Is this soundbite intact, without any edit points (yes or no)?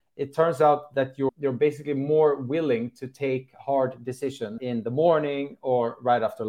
no